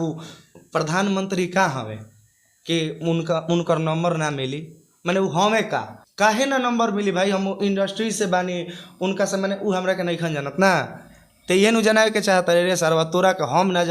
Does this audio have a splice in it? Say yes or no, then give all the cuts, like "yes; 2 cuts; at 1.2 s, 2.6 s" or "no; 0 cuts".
no; 0 cuts